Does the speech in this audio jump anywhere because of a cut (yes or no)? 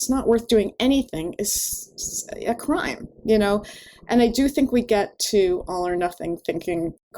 yes